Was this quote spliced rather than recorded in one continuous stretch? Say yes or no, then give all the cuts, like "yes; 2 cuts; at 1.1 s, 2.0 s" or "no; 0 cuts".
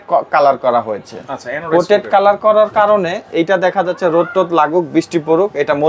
no; 0 cuts